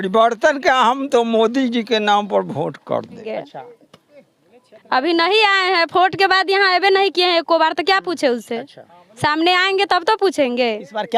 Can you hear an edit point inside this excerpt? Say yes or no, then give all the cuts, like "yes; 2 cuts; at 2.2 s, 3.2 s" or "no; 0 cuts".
yes; 1 cut; at 3.3 s